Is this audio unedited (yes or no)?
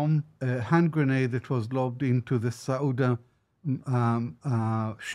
yes